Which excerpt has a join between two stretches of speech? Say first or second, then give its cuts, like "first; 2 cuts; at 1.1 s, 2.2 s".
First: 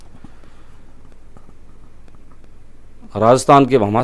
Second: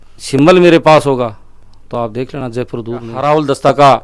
second; 1 cut; at 3.1 s